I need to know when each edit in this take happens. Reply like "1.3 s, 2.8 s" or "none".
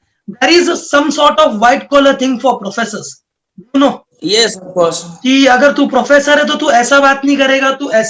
none